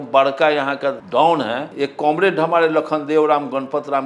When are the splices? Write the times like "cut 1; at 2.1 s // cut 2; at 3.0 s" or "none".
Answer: cut 1; at 1.0 s // cut 2; at 1.7 s